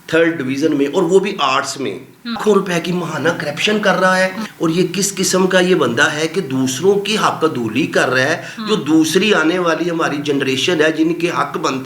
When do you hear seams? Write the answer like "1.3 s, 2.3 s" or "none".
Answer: 2.4 s, 4.4 s